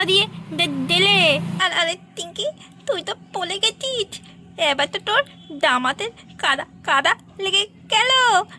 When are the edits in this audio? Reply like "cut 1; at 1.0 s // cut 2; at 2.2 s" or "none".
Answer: cut 1; at 1.5 s